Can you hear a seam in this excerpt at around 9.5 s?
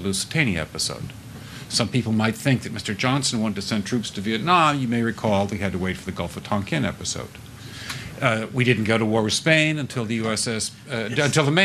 no; 2 cuts; at 1.5 s, 8.1 s

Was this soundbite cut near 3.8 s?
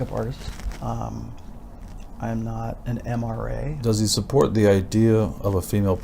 yes; 1 cut; at 3.8 s

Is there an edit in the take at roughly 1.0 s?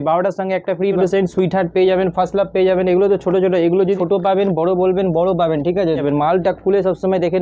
yes; 3 cuts; at 1.0 s, 4.0 s, 6.0 s

